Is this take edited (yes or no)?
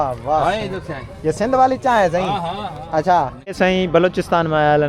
yes